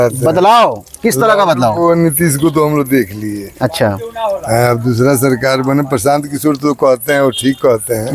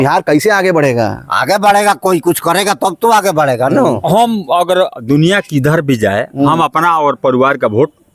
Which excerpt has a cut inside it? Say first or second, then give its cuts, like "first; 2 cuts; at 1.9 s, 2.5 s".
second; 1 cut; at 4.0 s